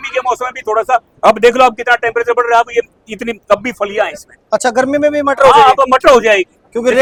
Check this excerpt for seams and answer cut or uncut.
uncut